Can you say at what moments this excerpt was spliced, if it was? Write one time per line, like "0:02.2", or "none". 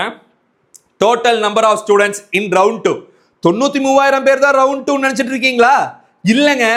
none